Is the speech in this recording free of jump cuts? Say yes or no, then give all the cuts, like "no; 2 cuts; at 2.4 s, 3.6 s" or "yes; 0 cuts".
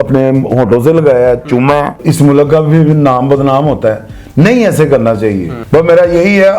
no; 2 cuts; at 2.0 s, 5.5 s